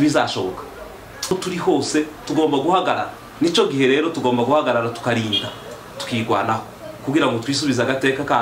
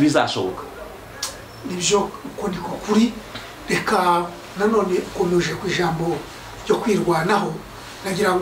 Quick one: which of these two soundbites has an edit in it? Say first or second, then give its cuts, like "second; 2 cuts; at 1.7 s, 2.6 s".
first; 1 cut; at 1.3 s